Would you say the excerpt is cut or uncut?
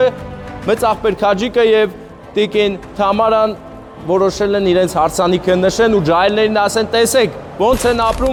uncut